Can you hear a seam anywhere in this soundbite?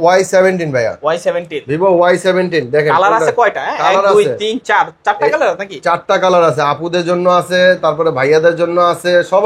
no; 0 cuts

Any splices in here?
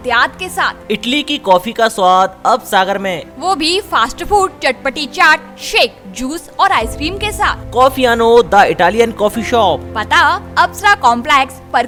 no; 0 cuts

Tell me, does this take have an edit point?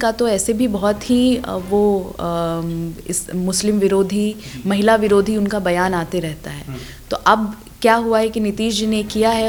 no; 0 cuts

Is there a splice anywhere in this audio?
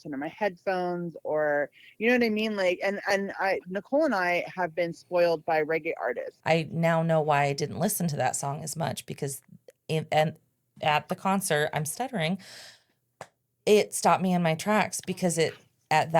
yes; 1 cut; at 6.3 s

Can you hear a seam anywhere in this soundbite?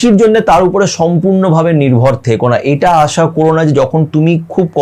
no; 0 cuts

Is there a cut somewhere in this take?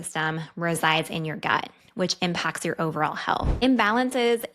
yes; 1 cut; at 3.5 s

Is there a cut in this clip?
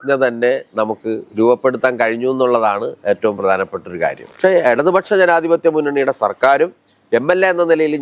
yes; 1 cut; at 4.3 s

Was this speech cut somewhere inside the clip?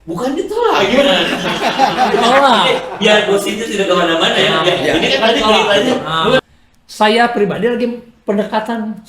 yes; 1 cut; at 6.4 s

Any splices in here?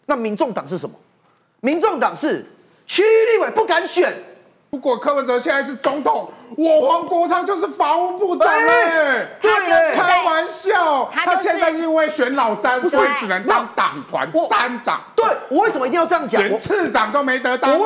yes; 1 cut; at 4.6 s

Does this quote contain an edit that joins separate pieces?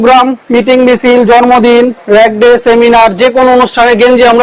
no; 0 cuts

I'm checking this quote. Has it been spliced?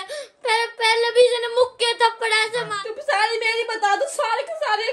yes; 1 cut; at 2.7 s

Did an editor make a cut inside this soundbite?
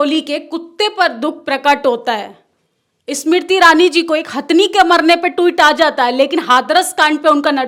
no; 0 cuts

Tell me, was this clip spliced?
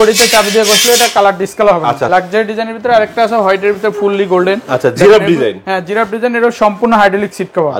yes; 1 cut; at 2.1 s

